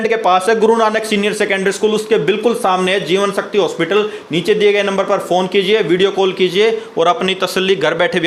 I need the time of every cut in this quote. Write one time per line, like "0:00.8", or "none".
none